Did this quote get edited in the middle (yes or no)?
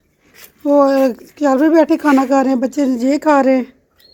no